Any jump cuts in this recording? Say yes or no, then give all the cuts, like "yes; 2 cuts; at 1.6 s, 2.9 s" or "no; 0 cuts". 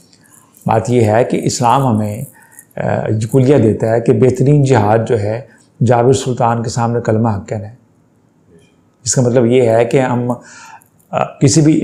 no; 0 cuts